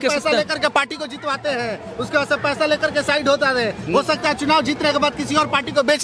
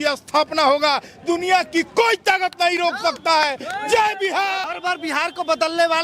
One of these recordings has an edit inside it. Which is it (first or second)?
second